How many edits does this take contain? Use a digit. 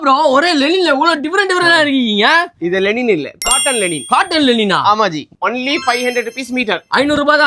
1